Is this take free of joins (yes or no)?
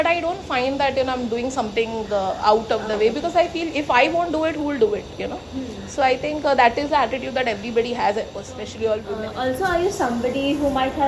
no